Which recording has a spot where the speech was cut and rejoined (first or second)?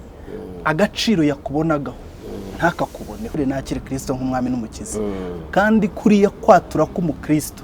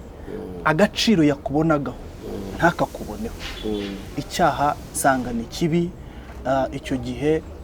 first